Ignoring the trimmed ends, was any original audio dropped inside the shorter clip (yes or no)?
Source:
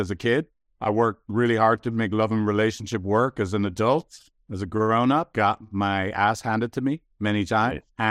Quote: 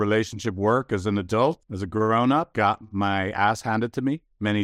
yes